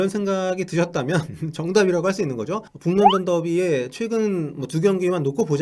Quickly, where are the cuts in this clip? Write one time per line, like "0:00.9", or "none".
0:02.7